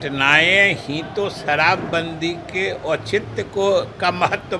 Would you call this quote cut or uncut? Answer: uncut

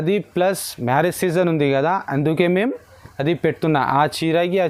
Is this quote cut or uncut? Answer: uncut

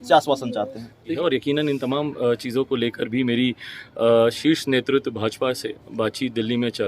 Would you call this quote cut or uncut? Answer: cut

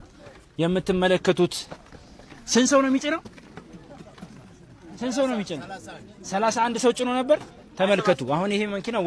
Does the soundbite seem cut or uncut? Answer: uncut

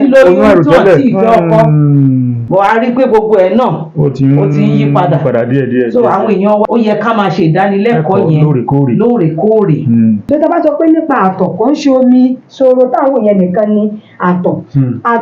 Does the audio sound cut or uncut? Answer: cut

